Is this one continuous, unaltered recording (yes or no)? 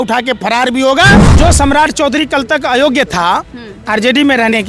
no